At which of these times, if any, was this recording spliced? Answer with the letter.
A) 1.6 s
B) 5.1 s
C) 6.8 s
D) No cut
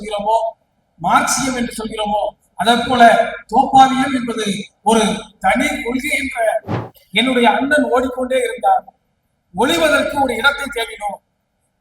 C